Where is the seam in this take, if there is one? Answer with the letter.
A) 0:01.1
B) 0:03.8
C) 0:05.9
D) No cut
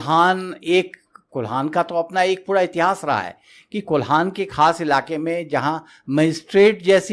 D